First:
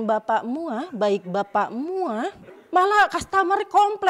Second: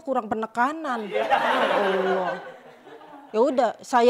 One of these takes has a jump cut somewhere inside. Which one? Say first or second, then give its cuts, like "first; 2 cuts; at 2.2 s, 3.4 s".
first; 1 cut; at 2.5 s